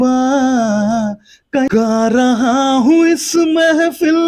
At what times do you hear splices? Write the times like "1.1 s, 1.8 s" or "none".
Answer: 1.7 s